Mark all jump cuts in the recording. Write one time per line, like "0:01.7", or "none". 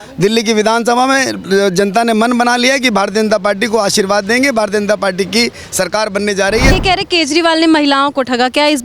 0:06.7